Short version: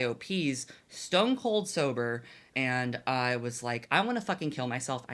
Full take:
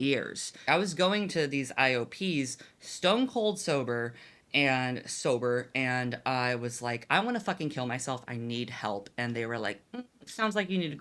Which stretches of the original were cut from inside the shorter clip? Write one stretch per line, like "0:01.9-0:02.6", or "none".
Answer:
0:04.4-0:05.7